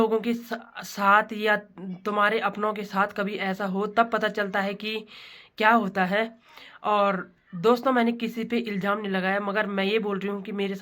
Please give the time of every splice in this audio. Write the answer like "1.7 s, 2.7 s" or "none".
none